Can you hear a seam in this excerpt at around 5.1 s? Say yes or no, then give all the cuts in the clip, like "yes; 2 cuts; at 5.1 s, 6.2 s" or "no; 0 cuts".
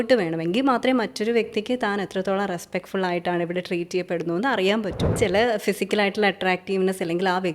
yes; 1 cut; at 5.1 s